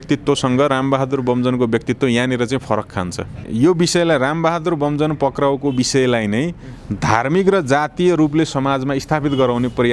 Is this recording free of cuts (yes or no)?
no